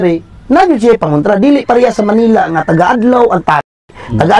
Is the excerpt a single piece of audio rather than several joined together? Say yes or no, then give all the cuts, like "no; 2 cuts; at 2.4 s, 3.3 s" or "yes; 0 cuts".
yes; 0 cuts